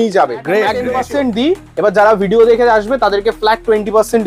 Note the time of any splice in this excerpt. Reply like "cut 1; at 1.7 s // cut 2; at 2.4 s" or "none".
cut 1; at 1.0 s